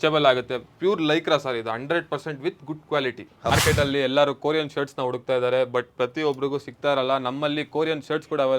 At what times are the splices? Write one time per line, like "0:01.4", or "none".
0:03.5